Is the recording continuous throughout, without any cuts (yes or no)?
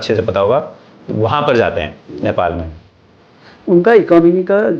no